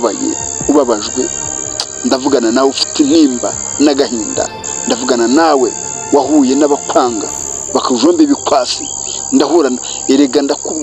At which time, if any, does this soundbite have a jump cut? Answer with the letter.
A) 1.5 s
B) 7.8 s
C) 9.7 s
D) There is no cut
D